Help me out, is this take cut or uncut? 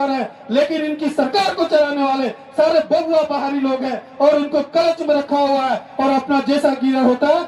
uncut